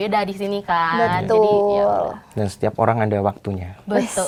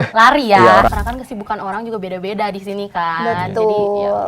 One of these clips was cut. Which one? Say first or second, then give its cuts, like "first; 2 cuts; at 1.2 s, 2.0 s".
second; 1 cut; at 0.9 s